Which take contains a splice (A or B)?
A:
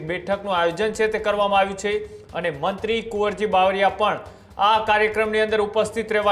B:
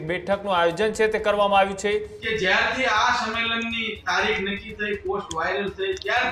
B